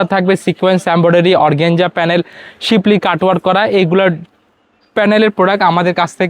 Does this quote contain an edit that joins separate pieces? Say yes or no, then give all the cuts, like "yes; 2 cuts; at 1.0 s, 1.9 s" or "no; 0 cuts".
no; 0 cuts